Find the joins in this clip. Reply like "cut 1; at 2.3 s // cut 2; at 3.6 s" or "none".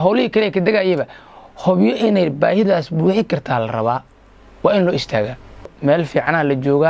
cut 1; at 5.7 s